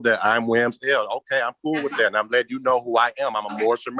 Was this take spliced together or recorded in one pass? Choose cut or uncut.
uncut